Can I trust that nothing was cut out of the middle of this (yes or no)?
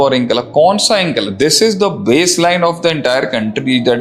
yes